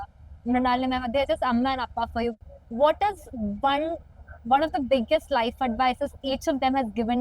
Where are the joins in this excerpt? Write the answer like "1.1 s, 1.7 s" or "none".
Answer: 2.3 s